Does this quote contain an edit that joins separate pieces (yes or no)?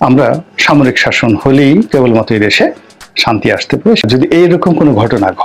yes